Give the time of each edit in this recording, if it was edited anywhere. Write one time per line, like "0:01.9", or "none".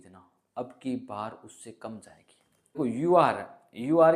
0:02.8